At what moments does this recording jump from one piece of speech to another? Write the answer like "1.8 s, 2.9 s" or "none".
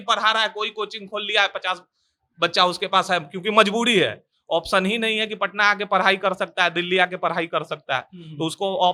none